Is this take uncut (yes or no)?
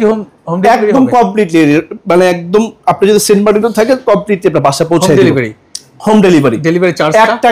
yes